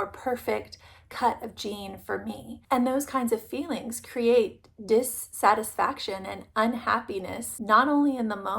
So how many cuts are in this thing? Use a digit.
1